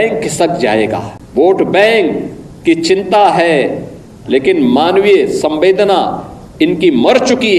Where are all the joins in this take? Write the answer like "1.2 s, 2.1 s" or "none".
1.2 s